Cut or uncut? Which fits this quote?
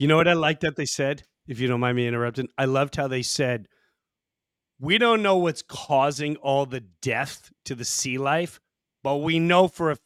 uncut